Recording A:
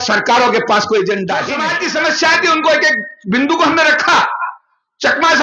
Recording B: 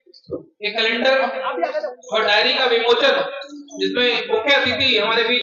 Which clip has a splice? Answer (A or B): A